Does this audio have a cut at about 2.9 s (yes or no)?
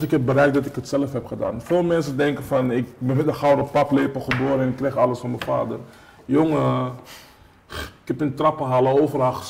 no